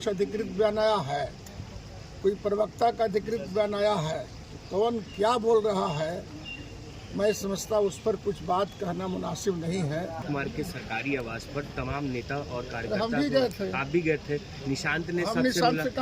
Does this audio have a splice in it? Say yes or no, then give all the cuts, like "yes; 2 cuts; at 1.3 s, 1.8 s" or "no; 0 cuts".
yes; 1 cut; at 10.2 s